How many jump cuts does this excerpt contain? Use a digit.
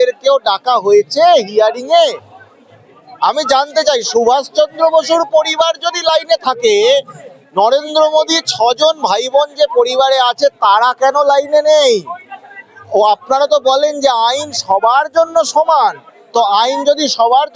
0